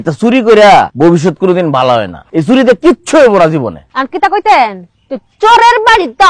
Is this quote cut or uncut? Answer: cut